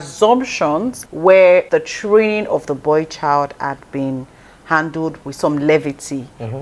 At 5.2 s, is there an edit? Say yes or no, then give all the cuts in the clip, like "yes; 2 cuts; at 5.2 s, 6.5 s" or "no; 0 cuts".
yes; 3 cuts; at 1.0 s, 1.7 s, 5.2 s